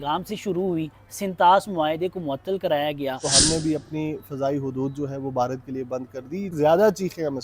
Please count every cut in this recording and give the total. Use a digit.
2